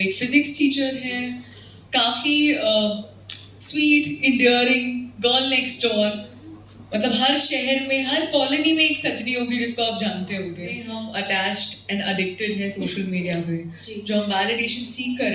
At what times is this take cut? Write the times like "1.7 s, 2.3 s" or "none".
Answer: 10.8 s